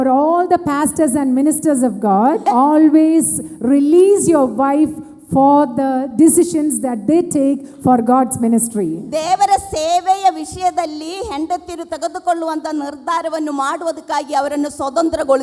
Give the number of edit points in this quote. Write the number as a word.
one